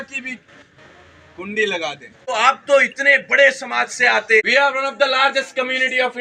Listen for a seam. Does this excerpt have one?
yes; 2 cuts; at 2.1 s, 4.4 s

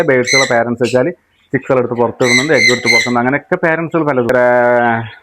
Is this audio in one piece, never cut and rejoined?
no; 1 cut; at 4.3 s

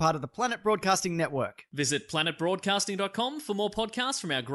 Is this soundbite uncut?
yes; 0 cuts

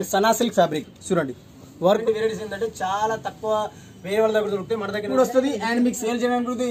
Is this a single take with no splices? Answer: no; 2 cuts; at 2.0 s, 5.1 s

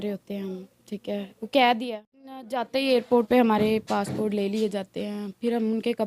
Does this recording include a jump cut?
yes; 1 cut; at 2.6 s

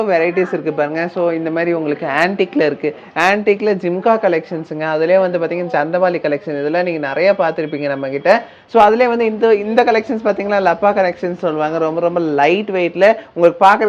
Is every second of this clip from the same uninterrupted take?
yes; 0 cuts

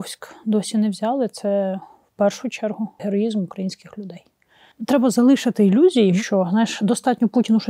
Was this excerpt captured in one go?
no; 3 cuts; at 3.0 s, 4.8 s, 6.2 s

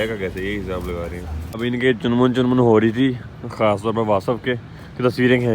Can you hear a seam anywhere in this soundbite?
yes; 1 cut; at 1.4 s

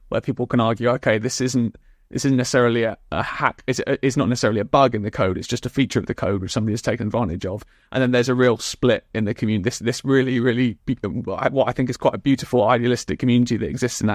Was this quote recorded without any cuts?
yes; 0 cuts

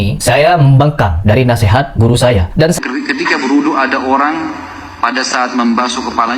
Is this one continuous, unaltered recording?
no; 1 cut; at 2.8 s

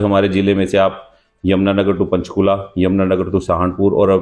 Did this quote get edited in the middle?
no; 0 cuts

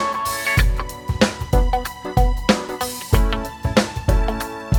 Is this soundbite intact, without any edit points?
yes; 0 cuts

